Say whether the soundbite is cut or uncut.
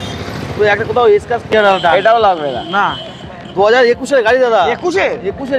cut